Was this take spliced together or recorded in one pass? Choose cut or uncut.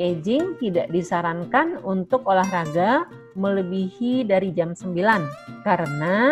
uncut